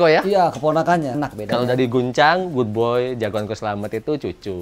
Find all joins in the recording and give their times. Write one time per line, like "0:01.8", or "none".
0:01.1

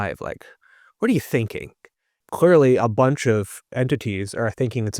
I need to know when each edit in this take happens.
0:02.2
0:03.6

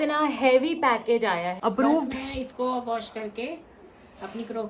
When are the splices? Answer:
0:01.5

